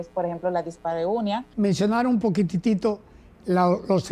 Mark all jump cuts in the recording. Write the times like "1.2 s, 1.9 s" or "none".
1.5 s